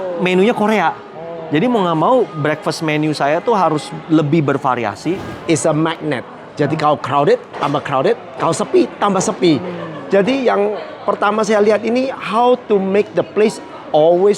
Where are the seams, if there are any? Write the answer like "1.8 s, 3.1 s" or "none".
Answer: 5.3 s